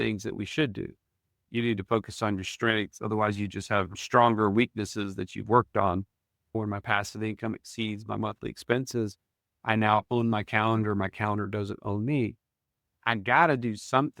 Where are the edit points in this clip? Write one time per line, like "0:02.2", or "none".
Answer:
0:01.4
0:06.5
0:12.9